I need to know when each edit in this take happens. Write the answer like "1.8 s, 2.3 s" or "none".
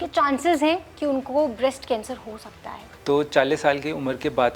2.9 s